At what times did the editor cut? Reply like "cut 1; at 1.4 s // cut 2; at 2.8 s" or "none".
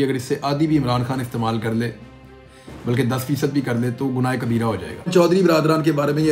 cut 1; at 5.1 s